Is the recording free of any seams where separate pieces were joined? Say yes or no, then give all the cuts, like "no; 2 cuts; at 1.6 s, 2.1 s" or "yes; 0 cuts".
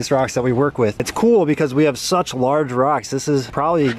yes; 0 cuts